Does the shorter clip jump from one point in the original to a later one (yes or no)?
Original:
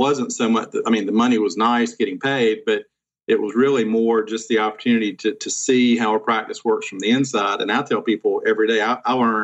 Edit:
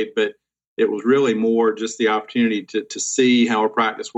no